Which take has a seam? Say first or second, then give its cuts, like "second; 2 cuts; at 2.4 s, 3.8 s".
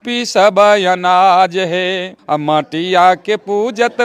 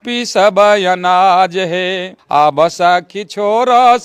first; 1 cut; at 2.1 s